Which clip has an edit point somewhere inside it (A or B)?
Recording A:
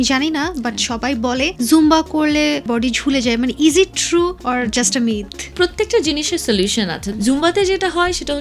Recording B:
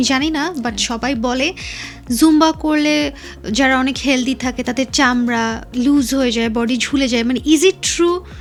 A